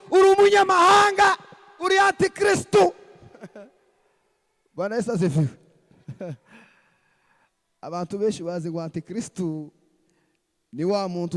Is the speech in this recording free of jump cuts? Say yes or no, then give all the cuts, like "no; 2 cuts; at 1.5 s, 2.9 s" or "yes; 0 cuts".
yes; 0 cuts